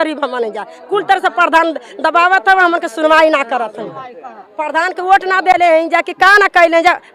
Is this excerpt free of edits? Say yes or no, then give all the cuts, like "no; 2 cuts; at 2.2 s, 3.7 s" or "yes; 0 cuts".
yes; 0 cuts